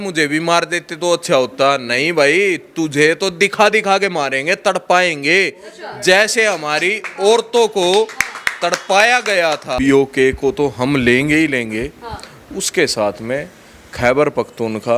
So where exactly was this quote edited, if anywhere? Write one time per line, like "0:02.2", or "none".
0:09.7